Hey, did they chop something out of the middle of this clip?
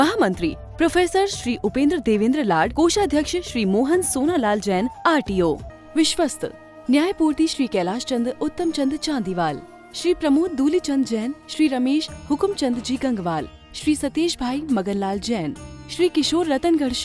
yes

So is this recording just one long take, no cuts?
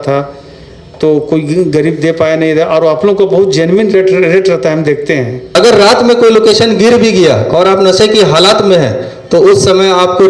no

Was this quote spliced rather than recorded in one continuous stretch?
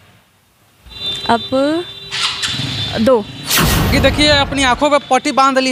yes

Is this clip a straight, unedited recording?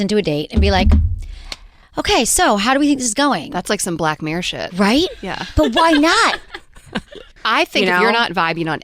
no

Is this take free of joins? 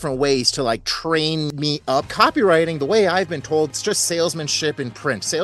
no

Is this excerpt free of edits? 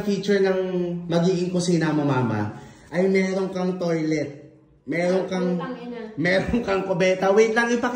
yes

